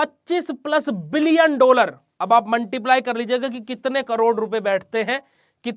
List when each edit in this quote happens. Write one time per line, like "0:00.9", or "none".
none